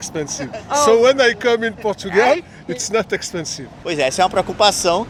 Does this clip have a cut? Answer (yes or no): no